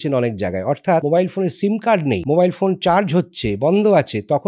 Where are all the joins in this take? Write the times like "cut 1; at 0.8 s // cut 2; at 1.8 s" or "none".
cut 1; at 1.0 s // cut 2; at 2.2 s